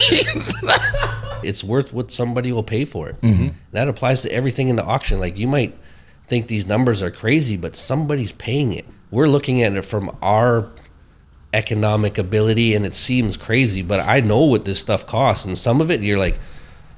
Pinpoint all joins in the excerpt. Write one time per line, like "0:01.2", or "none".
0:01.5
0:09.0